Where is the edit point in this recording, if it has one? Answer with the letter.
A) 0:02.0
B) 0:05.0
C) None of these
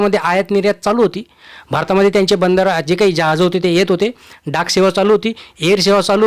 C